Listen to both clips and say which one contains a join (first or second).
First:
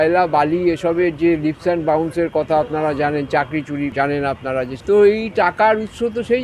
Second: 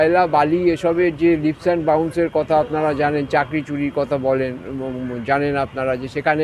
first